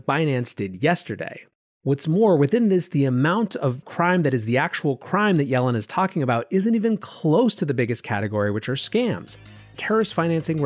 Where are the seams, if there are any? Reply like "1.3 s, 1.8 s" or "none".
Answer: 9.7 s